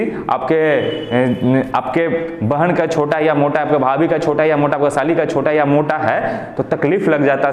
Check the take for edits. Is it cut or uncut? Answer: uncut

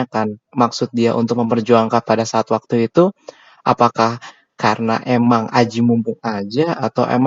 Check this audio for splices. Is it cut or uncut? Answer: uncut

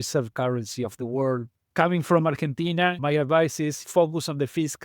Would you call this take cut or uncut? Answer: cut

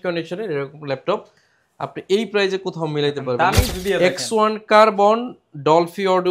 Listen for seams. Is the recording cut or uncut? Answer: cut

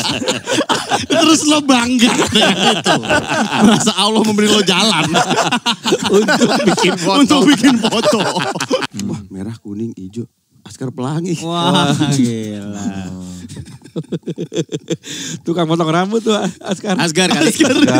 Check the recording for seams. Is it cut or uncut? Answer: cut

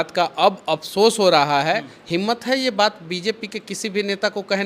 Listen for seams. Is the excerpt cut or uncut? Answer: cut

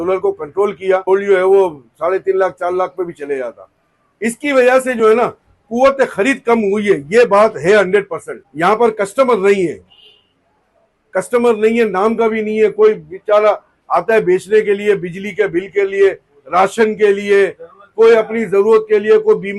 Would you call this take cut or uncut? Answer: cut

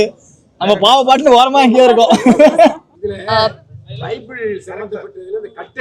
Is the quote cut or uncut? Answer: cut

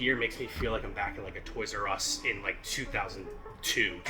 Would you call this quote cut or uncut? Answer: uncut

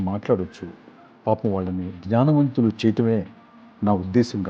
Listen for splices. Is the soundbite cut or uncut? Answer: uncut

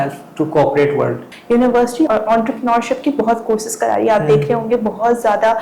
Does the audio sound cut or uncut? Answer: cut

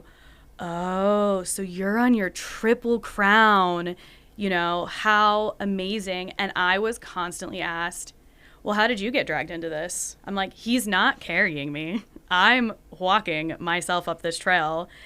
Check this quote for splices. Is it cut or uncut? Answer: cut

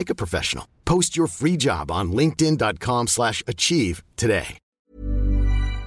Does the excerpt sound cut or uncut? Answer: cut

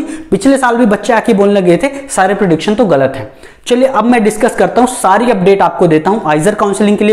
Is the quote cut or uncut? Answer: uncut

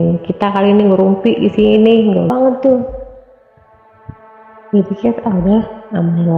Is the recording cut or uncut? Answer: cut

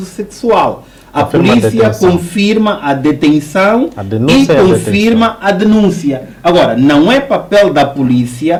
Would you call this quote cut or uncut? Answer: uncut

